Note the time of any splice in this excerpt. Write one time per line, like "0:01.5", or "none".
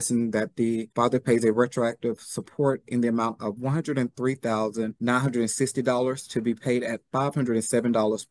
0:00.9
0:04.9